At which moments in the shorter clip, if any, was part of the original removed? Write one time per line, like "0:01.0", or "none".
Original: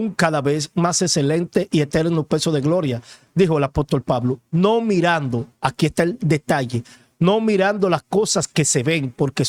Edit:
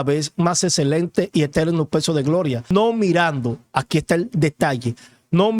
0:02.7